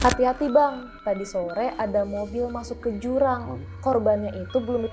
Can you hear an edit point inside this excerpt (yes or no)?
no